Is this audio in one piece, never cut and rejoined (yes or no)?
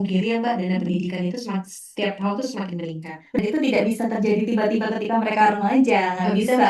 no